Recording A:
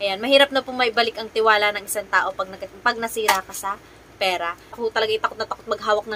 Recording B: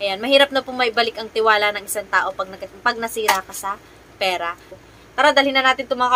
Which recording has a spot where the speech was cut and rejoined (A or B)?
A